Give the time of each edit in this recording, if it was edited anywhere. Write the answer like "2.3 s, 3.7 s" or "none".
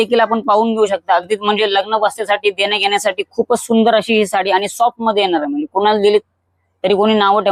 none

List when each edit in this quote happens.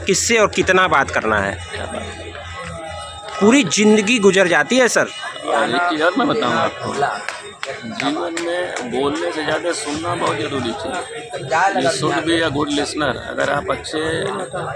none

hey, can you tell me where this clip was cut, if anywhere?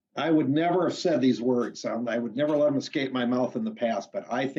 none

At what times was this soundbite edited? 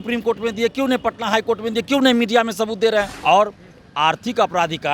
3.1 s

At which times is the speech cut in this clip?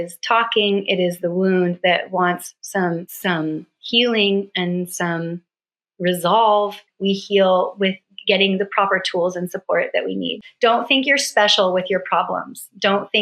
3.1 s, 6.8 s, 10.4 s

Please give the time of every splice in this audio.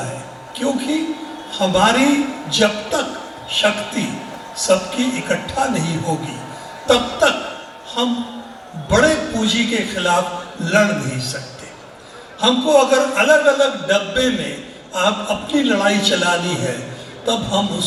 none

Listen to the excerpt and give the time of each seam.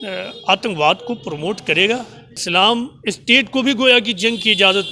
2.4 s

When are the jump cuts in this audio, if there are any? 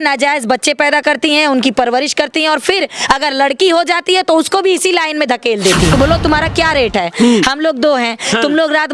5.9 s

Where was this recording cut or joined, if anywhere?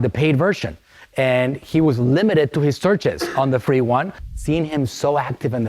4.1 s

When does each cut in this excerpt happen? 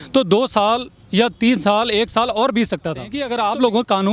3.2 s

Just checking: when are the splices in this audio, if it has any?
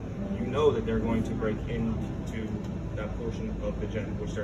none

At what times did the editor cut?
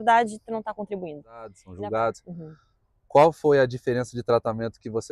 1.6 s

